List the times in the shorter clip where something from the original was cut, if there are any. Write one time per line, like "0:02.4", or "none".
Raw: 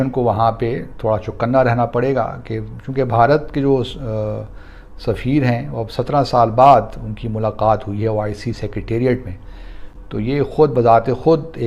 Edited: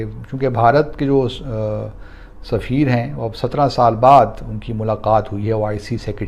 none